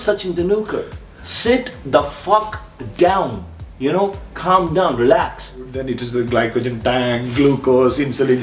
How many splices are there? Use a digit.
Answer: 1